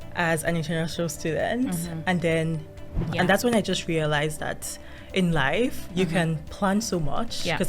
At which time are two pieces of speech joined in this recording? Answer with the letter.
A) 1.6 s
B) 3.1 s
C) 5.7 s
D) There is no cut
B